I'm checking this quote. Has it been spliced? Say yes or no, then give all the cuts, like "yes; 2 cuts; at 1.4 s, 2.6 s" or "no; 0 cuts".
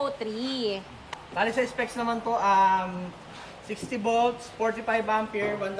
no; 0 cuts